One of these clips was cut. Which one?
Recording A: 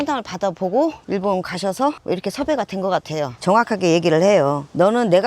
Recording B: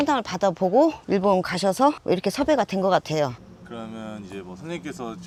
A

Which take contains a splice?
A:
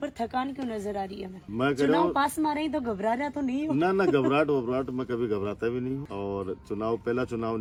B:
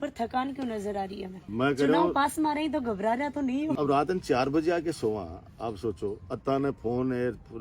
B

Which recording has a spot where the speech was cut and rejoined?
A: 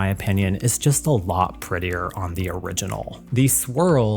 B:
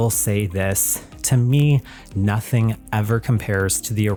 A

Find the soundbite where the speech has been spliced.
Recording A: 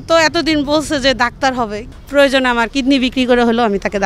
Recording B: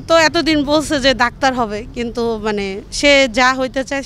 A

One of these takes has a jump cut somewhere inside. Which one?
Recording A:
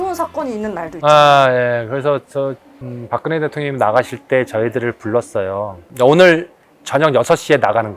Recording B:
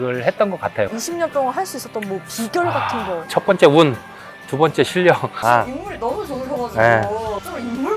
B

